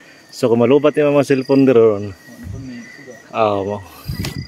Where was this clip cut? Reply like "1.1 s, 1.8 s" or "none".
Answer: none